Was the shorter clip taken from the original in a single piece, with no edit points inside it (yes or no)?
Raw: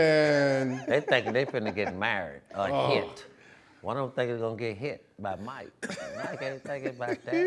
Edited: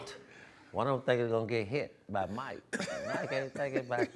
yes